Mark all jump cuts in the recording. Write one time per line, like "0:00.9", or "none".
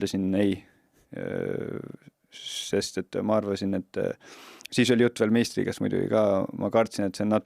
none